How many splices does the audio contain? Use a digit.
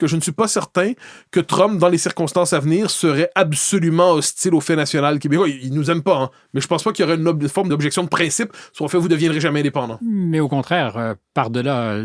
1